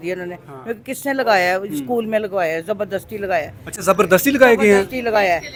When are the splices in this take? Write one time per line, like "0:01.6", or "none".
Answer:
none